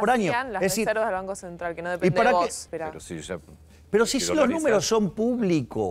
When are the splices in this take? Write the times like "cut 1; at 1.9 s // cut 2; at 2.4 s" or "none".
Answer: cut 1; at 2.7 s